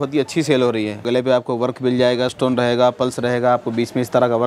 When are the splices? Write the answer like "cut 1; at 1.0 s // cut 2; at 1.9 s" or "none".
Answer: cut 1; at 1.0 s // cut 2; at 2.3 s